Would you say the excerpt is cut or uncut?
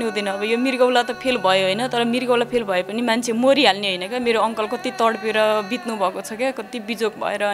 uncut